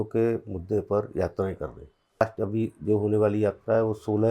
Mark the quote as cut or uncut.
cut